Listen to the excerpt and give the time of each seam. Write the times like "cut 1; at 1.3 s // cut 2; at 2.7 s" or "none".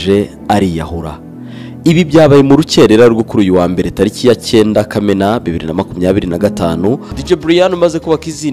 cut 1; at 7.1 s